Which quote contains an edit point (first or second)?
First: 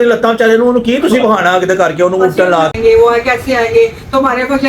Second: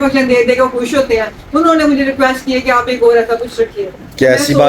first